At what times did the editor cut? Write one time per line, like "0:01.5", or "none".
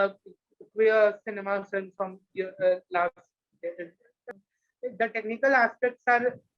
0:04.3